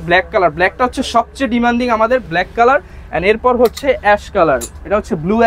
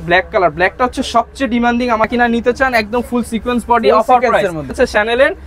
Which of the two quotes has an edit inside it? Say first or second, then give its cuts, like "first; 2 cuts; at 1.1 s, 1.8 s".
second; 2 cuts; at 2.1 s, 4.7 s